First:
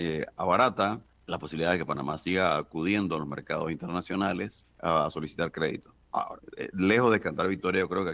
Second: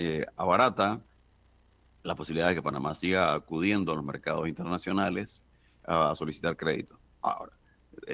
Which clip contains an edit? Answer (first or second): first